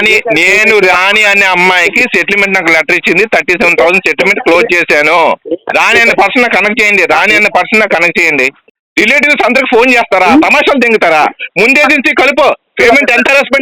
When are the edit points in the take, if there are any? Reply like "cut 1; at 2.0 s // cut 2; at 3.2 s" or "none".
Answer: cut 1; at 8.7 s